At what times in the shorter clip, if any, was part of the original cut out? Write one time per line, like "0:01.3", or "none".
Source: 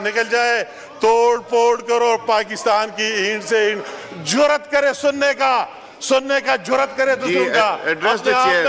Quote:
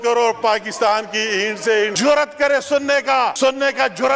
0:01.9
0:03.3